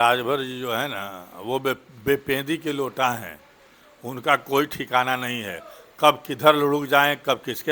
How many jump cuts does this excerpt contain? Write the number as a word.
zero